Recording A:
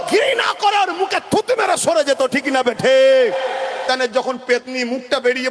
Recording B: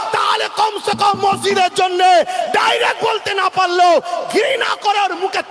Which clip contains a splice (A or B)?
A